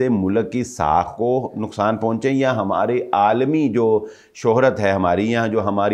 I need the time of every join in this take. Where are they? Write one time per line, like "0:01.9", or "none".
none